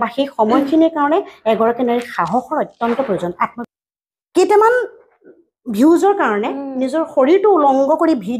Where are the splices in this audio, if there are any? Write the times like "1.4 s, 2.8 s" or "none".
3.5 s